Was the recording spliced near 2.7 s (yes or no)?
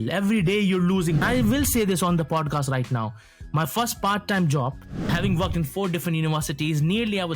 no